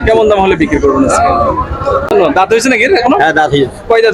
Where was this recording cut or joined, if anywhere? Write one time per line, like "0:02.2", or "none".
0:02.1